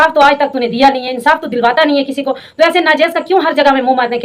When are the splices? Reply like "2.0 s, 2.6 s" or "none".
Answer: none